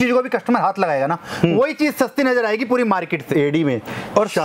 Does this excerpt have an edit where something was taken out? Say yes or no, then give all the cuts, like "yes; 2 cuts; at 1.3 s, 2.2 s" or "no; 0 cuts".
yes; 1 cut; at 3.3 s